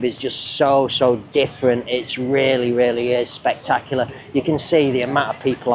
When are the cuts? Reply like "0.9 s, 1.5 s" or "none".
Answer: none